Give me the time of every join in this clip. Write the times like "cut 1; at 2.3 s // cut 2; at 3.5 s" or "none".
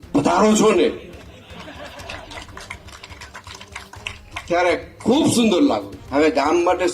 cut 1; at 5.9 s